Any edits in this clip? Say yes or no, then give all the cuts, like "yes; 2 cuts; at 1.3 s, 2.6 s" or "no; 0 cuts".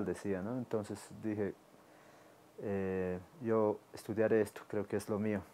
no; 0 cuts